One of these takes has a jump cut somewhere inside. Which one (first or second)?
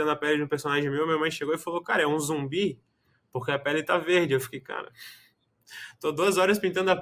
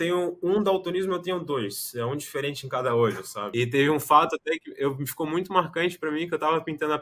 second